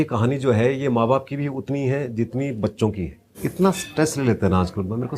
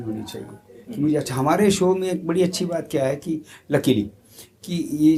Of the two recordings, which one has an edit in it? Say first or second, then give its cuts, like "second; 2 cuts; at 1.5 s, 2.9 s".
first; 1 cut; at 3.4 s